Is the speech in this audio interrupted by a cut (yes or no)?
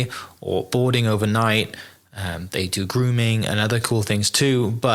no